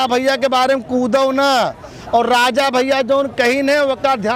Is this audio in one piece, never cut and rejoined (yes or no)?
yes